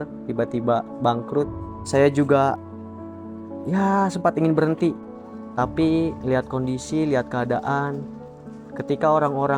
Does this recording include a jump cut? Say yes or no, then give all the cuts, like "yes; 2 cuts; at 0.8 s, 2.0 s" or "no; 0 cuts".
yes; 1 cut; at 1.6 s